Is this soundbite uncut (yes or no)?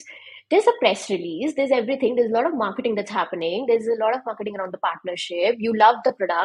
yes